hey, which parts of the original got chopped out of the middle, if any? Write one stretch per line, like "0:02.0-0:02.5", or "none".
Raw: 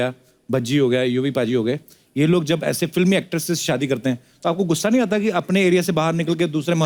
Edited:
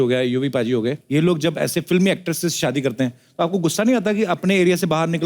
0:01.8-0:02.1